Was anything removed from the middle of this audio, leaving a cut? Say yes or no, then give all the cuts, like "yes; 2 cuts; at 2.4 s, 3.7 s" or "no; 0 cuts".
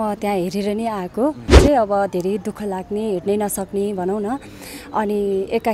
yes; 1 cut; at 1.6 s